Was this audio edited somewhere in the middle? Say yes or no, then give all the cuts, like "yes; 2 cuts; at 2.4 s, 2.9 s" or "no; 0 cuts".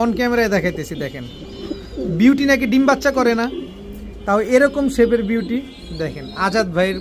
no; 0 cuts